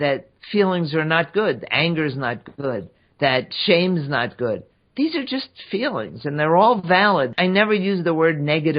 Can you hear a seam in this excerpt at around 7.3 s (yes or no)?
yes